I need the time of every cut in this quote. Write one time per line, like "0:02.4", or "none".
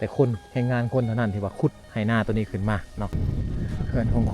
0:03.2